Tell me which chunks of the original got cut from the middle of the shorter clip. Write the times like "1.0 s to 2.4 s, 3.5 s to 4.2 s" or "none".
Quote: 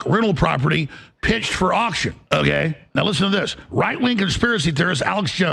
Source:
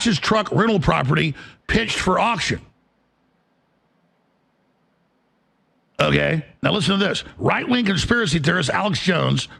2.7 s to 5.9 s